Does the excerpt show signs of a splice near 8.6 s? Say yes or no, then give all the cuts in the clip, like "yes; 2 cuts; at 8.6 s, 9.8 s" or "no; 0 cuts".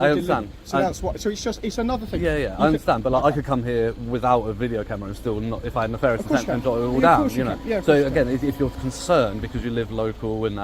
no; 0 cuts